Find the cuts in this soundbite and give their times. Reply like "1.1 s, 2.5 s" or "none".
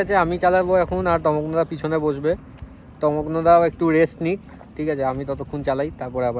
none